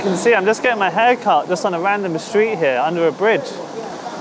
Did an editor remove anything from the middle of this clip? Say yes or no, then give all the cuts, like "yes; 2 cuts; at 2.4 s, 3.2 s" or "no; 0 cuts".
no; 0 cuts